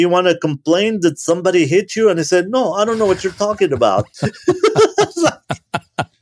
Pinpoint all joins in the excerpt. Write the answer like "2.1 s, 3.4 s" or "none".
none

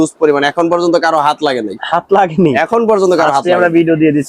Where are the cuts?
none

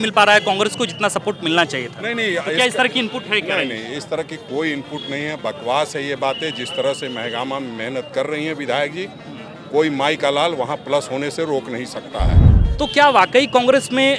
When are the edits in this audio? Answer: 12.5 s

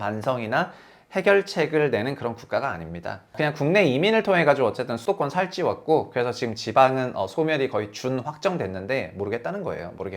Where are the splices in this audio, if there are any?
3.4 s, 5.0 s

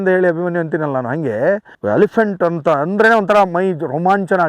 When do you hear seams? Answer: 1.7 s

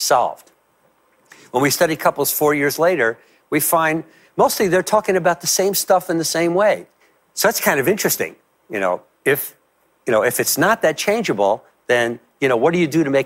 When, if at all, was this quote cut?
none

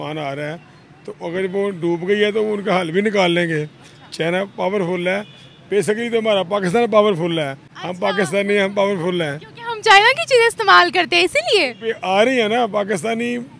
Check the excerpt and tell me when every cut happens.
none

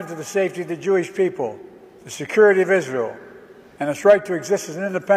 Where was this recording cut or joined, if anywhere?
none

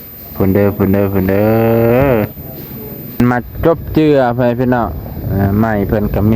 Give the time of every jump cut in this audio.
3.2 s

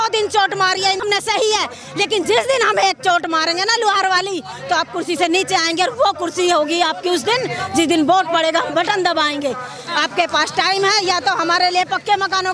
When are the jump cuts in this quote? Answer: 1.0 s

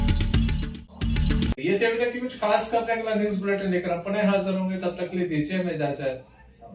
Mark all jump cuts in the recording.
none

